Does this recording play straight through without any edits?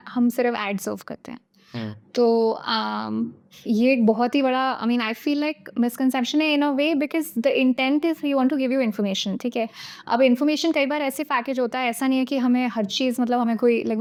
yes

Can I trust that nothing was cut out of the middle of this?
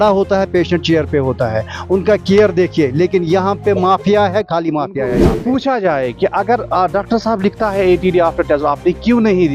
no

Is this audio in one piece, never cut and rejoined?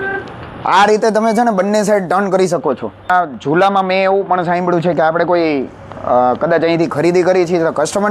no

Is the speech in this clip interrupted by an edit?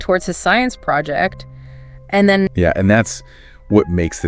yes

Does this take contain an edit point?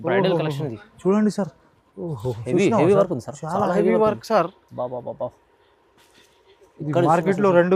no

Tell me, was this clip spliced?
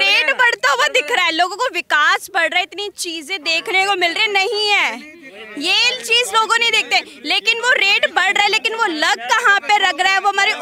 no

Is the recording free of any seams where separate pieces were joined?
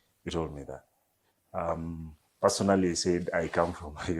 yes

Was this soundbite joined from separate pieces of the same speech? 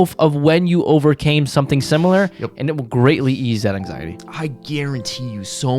yes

